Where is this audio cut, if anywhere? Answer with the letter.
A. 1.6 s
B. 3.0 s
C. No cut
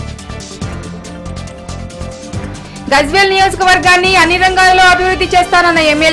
A